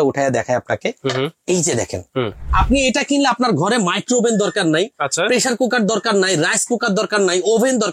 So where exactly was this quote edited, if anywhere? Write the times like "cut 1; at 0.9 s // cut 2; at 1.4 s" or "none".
cut 1; at 2.4 s